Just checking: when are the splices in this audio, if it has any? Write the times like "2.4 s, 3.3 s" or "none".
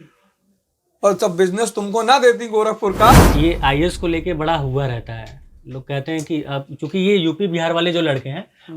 3.1 s